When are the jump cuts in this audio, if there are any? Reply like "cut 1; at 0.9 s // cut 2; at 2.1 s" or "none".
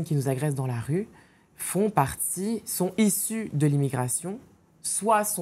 none